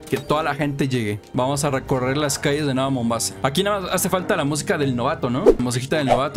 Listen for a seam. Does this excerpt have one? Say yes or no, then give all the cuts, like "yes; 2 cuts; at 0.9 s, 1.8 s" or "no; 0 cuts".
yes; 2 cuts; at 1.2 s, 3.3 s